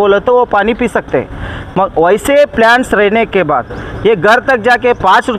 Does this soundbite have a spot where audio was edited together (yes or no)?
no